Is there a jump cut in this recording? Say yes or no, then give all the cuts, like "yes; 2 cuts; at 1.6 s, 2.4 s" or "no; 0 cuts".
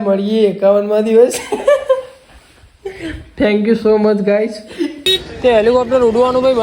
yes; 1 cut; at 5.1 s